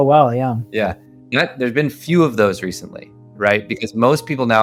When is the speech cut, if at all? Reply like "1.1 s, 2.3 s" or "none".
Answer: none